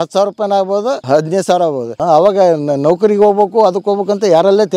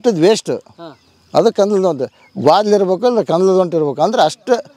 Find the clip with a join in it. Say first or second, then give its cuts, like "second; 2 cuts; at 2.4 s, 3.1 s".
first; 2 cuts; at 1.0 s, 1.9 s